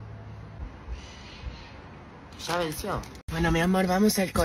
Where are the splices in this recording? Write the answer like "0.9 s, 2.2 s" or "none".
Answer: 3.2 s